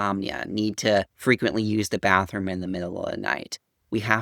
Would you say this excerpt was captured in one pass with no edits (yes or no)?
no